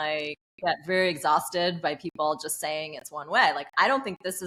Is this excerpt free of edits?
yes; 0 cuts

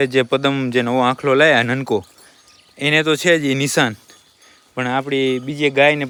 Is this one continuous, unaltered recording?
yes; 0 cuts

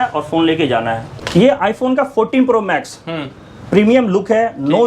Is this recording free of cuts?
no; 1 cut; at 1.0 s

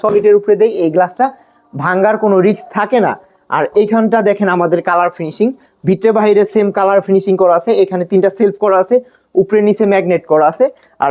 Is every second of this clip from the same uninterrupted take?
yes; 0 cuts

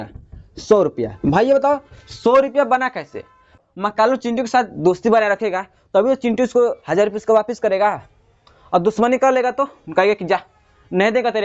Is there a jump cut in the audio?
yes; 1 cut; at 3.6 s

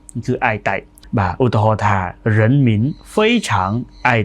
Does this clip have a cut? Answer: yes; 1 cut; at 0.9 s

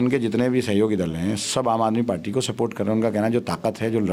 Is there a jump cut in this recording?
no; 0 cuts

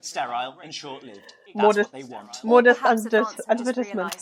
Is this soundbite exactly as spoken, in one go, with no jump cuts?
yes; 0 cuts

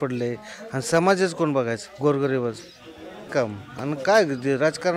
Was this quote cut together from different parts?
yes; 1 cut; at 3.3 s

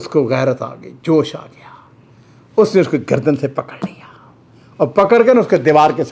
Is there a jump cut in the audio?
no; 0 cuts

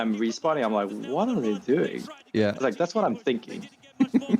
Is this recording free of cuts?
yes; 0 cuts

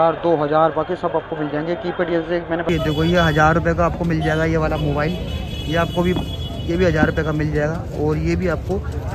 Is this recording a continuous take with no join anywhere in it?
no; 1 cut; at 2.7 s

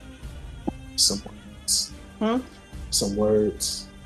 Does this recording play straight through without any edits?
yes; 0 cuts

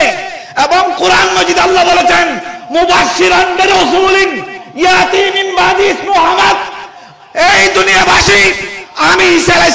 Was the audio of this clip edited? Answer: no; 0 cuts

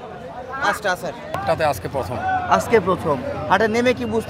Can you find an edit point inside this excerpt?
yes; 1 cut; at 1.3 s

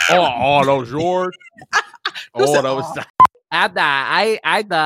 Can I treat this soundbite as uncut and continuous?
no; 1 cut; at 3.4 s

